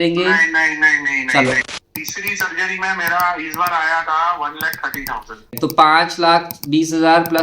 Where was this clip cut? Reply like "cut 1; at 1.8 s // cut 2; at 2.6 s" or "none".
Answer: cut 1; at 1.7 s // cut 2; at 5.6 s